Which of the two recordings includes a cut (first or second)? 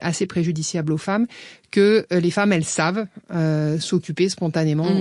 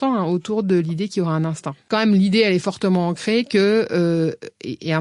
second